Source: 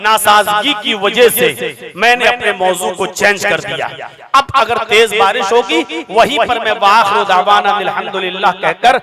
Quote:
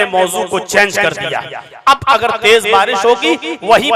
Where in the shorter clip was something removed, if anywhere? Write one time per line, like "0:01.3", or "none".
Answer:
none